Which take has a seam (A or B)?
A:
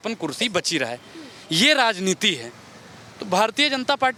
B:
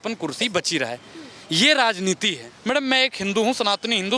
B